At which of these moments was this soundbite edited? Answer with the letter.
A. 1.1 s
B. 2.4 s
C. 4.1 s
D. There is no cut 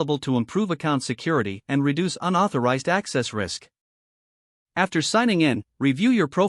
D